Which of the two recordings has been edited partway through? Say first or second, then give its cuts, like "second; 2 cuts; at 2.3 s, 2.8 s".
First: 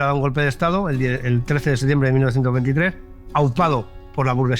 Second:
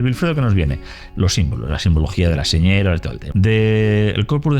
second; 1 cut; at 3.2 s